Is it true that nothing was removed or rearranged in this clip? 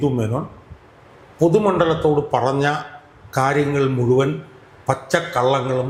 yes; 0 cuts

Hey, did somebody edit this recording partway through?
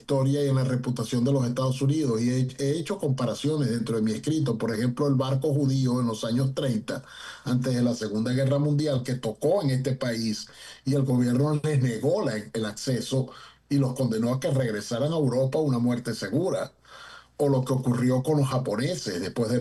no; 0 cuts

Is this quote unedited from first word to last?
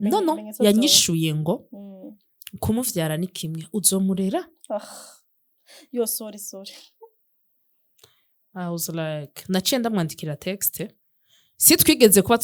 yes; 0 cuts

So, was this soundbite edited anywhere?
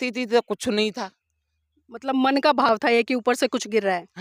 no; 0 cuts

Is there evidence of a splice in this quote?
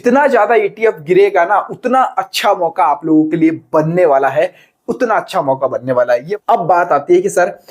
yes; 1 cut; at 6.3 s

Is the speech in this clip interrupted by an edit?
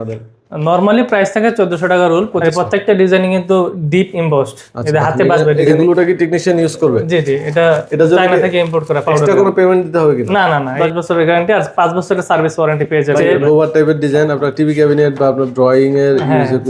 yes; 4 cuts; at 2.4 s, 5.6 s, 10.7 s, 13.3 s

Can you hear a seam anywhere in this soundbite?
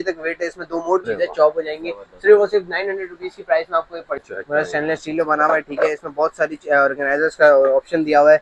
yes; 2 cuts; at 1.0 s, 4.2 s

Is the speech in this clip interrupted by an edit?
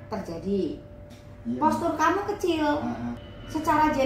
yes; 1 cut; at 1.3 s

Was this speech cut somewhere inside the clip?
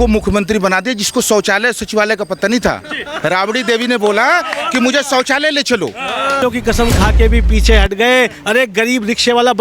yes; 1 cut; at 6.4 s

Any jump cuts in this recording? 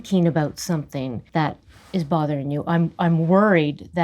yes; 1 cut; at 1.2 s

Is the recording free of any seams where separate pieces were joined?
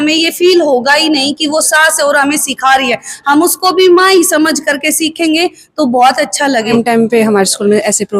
no; 1 cut; at 6.7 s

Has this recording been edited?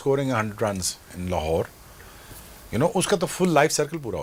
no; 0 cuts

